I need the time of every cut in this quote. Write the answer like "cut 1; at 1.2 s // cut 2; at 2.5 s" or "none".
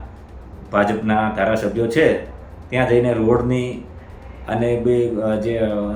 none